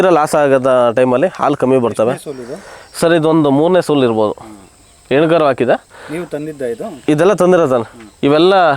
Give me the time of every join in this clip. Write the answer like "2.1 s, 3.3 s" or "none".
none